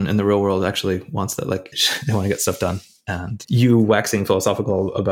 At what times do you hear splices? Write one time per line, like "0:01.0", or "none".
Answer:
0:01.8